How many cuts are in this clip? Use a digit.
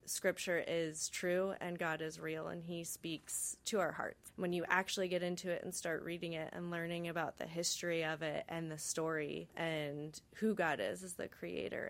2